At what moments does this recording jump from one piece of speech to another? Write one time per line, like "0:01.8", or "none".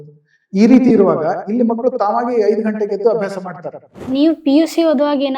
0:04.1